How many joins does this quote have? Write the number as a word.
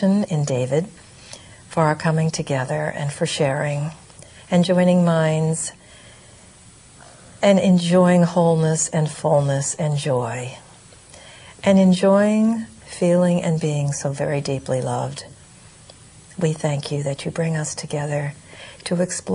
one